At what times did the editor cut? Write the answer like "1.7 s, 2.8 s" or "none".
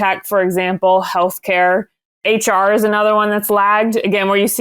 2.1 s